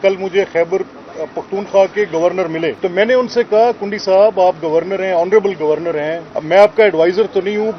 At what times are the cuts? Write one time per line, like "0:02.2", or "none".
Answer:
0:02.8
0:06.3